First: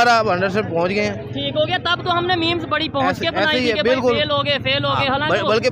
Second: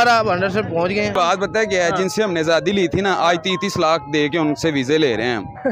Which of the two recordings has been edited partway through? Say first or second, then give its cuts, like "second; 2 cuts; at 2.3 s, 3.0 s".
second; 1 cut; at 1.1 s